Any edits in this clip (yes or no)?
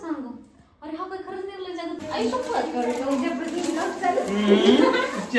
yes